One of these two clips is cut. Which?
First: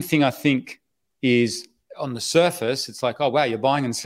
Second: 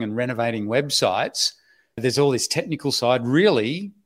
second; 1 cut; at 2.0 s

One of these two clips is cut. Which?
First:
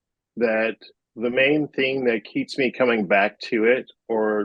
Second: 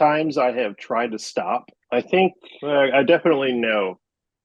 second; 1 cut; at 1.7 s

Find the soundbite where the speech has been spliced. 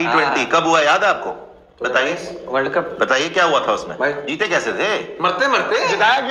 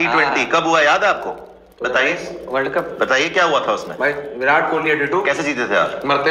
first; 1 cut; at 4.2 s

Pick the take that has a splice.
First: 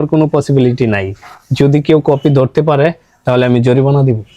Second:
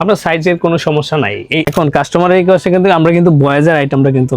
second; 1 cut; at 1.7 s

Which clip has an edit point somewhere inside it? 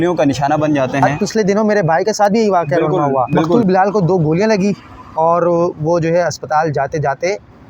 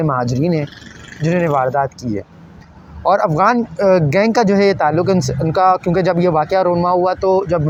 first; 2 cuts; at 1.1 s, 3.5 s

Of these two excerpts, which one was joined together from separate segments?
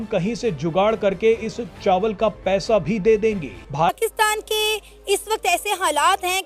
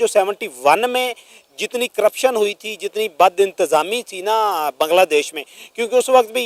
first; 1 cut; at 3.9 s

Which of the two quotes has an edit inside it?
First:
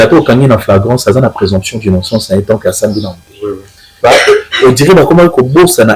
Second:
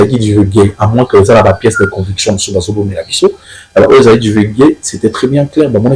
first; 1 cut; at 3.9 s

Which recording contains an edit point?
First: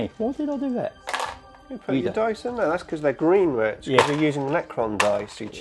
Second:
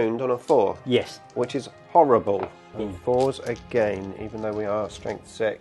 second; 1 cut; at 2.7 s

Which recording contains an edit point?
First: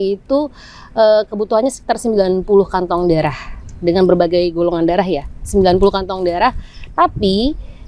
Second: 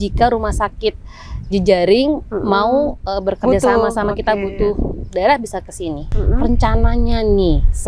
second; 1 cut; at 6.1 s

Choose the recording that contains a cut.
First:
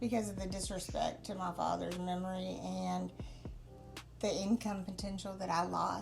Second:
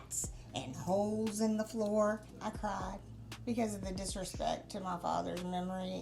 second; 1 cut; at 2.3 s

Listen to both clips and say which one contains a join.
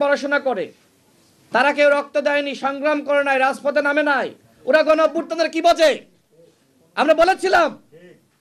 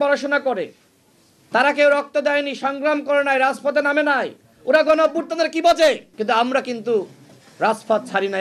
second; 1 cut; at 6.1 s

